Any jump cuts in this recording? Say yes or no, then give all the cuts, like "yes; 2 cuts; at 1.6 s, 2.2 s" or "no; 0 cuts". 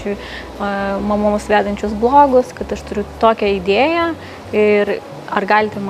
yes; 1 cut; at 2.9 s